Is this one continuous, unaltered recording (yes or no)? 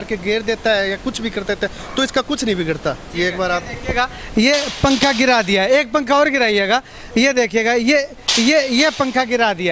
yes